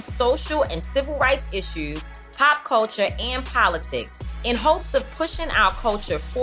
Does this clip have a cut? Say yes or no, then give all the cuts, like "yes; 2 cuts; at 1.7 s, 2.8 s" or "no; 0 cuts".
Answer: no; 0 cuts